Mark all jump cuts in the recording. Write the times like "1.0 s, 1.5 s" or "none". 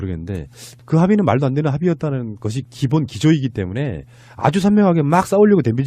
3.4 s